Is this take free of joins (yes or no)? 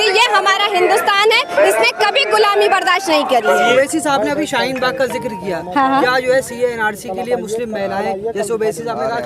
no